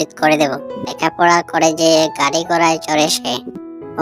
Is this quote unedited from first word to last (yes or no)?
no